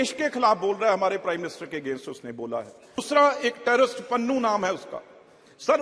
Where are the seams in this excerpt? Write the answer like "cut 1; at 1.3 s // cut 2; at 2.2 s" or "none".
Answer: cut 1; at 3.0 s